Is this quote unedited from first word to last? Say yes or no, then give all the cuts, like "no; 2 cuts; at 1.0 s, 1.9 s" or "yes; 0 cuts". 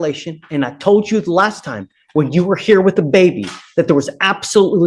yes; 0 cuts